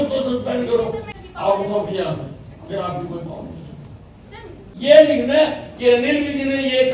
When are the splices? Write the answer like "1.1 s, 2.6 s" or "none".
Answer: 1.0 s, 4.7 s